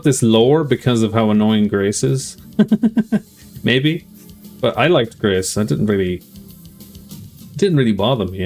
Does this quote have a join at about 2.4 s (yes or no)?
no